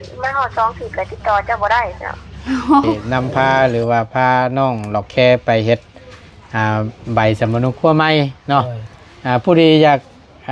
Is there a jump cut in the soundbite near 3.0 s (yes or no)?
yes